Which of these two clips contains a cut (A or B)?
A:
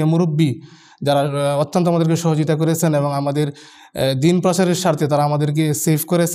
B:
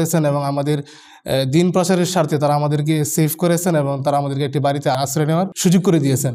B